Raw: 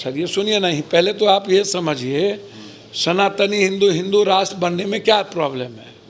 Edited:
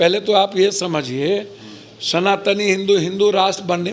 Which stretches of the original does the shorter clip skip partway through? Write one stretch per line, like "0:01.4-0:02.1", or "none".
none